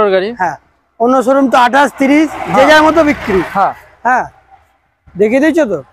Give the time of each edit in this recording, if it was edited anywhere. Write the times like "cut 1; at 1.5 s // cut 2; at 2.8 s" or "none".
none